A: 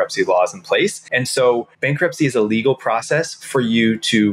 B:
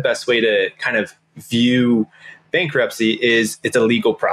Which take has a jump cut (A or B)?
A